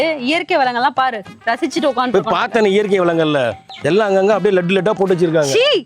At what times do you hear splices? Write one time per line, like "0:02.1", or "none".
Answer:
none